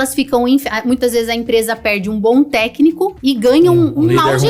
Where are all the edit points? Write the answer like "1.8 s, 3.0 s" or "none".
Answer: 3.2 s